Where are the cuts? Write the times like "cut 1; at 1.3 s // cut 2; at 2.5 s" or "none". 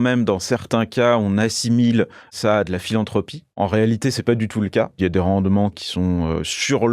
cut 1; at 2.3 s // cut 2; at 3.6 s // cut 3; at 5.0 s // cut 4; at 5.8 s

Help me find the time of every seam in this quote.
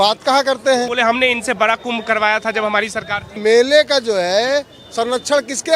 cut 1; at 0.9 s // cut 2; at 3.3 s

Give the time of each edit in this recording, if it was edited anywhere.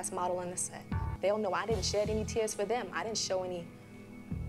cut 1; at 1.1 s

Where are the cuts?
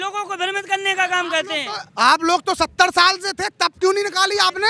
none

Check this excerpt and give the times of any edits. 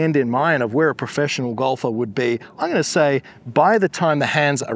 none

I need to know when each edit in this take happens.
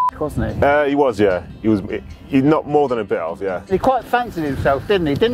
cut 1; at 3.7 s

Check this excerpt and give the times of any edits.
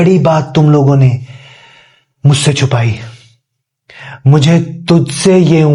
none

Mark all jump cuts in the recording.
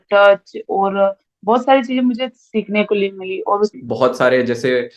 cut 1; at 3.7 s

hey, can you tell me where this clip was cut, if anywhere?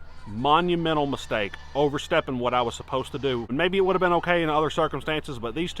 cut 1; at 3.5 s

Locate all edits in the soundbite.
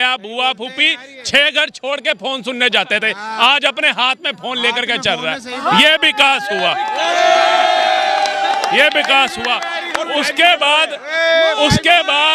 none

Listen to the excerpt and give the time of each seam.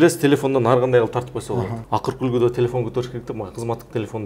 cut 1; at 1.8 s

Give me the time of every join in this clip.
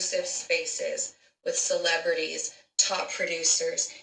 none

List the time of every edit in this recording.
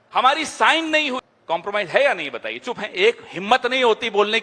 cut 1; at 1.3 s

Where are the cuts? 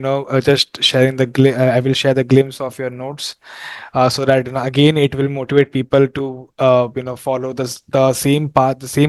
none

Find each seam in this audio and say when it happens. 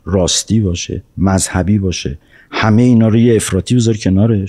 none

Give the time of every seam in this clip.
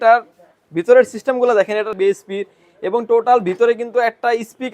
cut 1; at 1.9 s

